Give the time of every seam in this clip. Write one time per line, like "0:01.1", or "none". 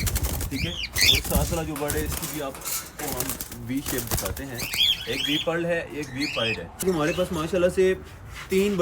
0:06.8

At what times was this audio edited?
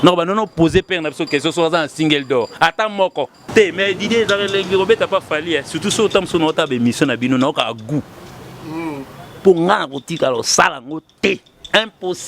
0:03.4

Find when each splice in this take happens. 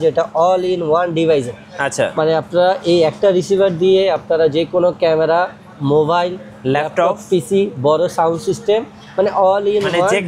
none

